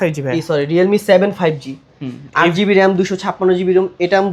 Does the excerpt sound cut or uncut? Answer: uncut